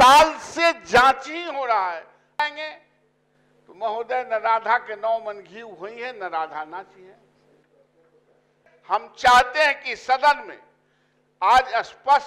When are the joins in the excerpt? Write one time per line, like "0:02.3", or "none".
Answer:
0:02.4
0:08.7